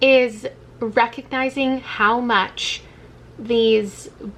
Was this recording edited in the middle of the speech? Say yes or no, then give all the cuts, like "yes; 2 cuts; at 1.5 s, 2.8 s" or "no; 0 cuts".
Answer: no; 0 cuts